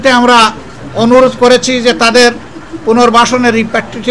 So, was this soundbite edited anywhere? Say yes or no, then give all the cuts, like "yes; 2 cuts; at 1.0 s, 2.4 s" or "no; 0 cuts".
no; 0 cuts